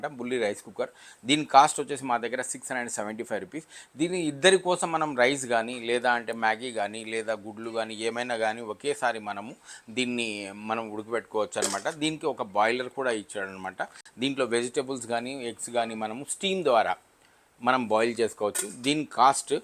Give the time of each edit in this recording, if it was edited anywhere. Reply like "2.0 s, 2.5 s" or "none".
none